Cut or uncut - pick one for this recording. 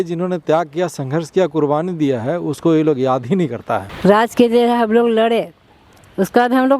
cut